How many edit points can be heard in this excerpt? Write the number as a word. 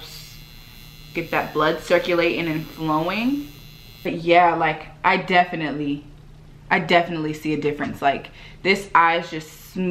one